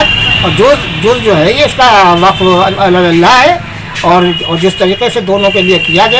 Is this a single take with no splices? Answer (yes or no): yes